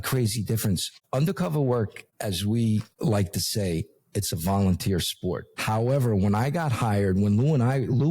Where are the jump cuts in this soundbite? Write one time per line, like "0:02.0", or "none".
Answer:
0:00.9
0:02.0
0:02.9
0:05.5